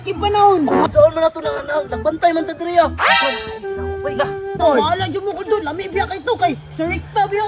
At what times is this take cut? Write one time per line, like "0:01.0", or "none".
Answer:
0:00.9
0:04.6